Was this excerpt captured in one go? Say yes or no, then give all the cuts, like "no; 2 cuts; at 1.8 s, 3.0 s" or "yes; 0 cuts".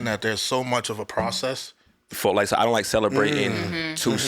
no; 1 cut; at 2.2 s